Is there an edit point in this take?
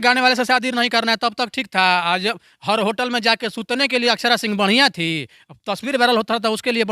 no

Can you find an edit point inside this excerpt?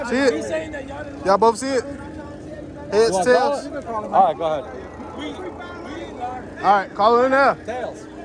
no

